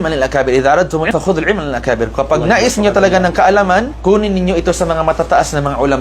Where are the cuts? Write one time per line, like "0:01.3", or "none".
0:01.1